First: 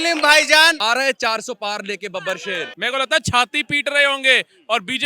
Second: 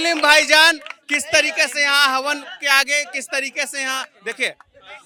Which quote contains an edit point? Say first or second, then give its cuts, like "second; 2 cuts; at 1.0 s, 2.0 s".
first; 2 cuts; at 0.8 s, 2.7 s